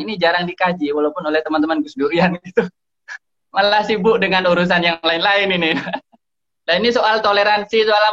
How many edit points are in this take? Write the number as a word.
zero